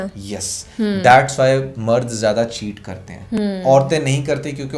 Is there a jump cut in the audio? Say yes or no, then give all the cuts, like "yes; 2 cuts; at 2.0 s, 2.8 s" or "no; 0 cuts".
no; 0 cuts